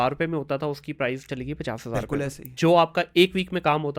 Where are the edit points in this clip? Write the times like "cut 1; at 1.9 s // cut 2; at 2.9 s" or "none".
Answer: none